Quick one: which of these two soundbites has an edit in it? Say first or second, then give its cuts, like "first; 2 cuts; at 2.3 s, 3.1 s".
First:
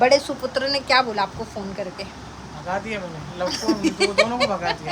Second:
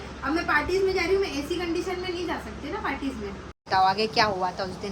second; 1 cut; at 3.7 s